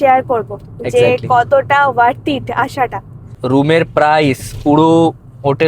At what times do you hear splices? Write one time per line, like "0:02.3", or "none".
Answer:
0:03.4